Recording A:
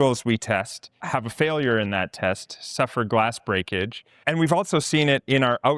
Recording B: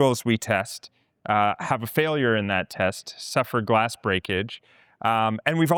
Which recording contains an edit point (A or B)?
A